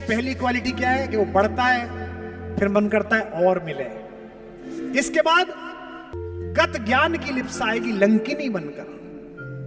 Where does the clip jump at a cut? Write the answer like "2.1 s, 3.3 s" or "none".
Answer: none